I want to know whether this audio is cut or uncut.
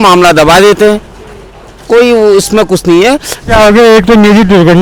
cut